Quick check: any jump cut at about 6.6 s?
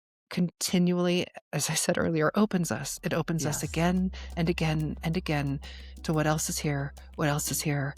no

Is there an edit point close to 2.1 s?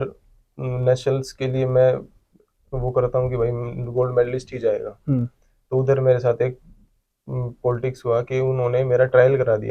no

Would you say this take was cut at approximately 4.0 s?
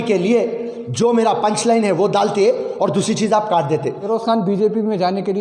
yes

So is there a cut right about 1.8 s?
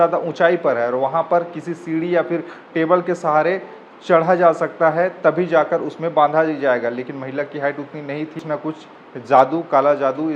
no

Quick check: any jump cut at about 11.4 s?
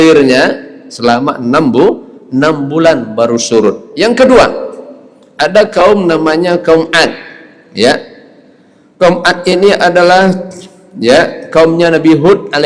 no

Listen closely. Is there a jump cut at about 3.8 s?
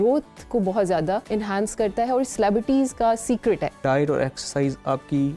yes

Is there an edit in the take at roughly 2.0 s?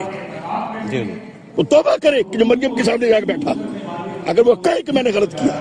no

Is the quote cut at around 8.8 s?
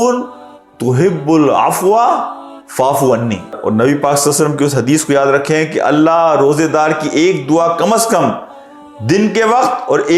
no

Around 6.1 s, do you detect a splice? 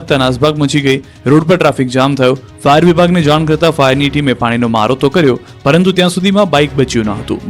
no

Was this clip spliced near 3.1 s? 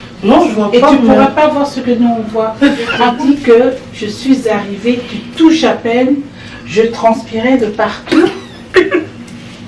yes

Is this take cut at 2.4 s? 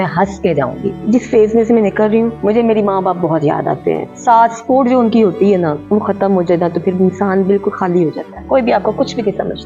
yes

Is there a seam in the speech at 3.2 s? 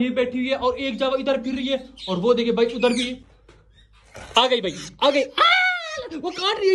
yes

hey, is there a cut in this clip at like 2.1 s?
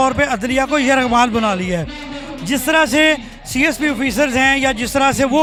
no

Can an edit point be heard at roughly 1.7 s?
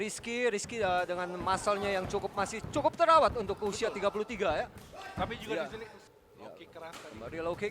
no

